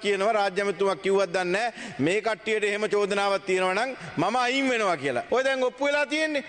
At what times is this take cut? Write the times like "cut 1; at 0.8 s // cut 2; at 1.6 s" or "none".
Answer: cut 1; at 5.2 s